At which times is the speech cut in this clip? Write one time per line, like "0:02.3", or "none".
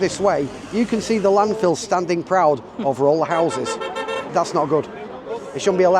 0:04.3